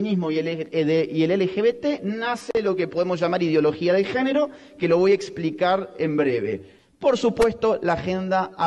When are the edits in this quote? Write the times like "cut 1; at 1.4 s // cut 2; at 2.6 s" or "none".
cut 1; at 6.7 s